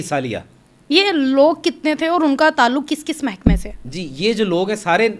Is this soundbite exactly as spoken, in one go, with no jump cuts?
yes; 0 cuts

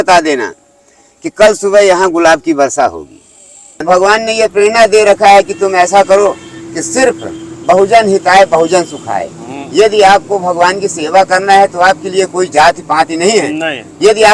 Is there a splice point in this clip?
yes; 1 cut; at 3.8 s

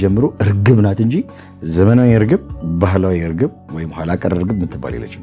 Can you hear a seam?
no; 0 cuts

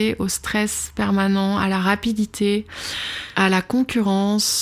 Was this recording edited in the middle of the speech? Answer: yes; 1 cut; at 3.2 s

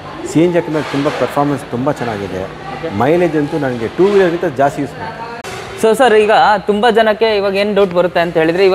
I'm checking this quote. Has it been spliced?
yes; 1 cut; at 5.3 s

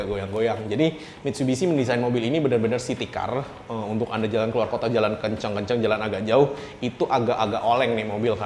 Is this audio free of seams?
yes; 0 cuts

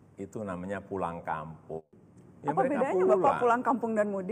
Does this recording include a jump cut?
yes; 1 cut; at 2.0 s

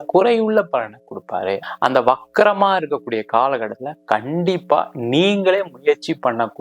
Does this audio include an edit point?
yes; 1 cut; at 1.6 s

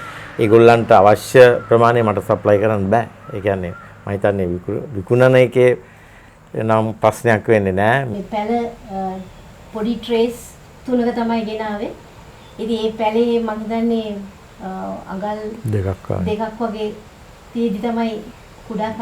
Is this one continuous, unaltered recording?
no; 1 cut; at 8.1 s

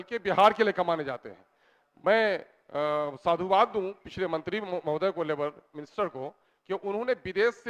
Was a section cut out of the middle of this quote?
no; 0 cuts

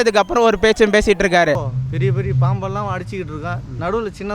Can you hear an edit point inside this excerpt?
yes; 1 cut; at 1.7 s

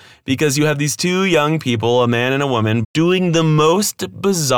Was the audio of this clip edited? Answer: yes; 1 cut; at 2.8 s

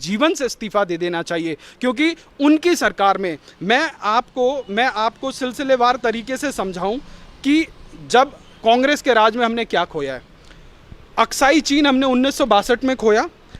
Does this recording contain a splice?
no; 0 cuts

